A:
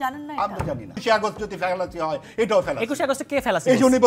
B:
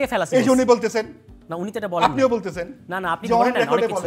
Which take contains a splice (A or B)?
A